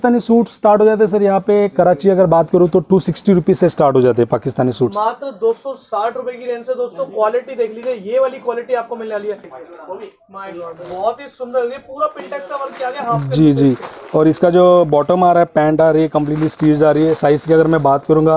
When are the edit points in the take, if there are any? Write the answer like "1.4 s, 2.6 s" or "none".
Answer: 9.5 s